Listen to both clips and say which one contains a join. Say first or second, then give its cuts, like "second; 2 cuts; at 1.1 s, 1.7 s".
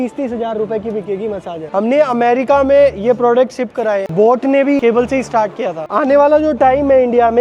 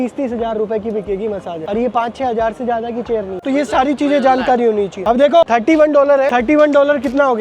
first; 3 cuts; at 1.6 s, 4.1 s, 5.9 s